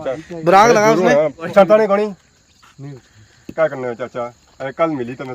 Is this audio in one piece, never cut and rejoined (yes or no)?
no